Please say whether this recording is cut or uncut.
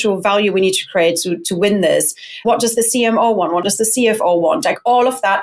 cut